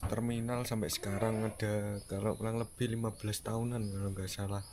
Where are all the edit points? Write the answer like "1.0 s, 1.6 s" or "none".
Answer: none